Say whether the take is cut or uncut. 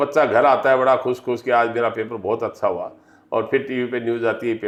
uncut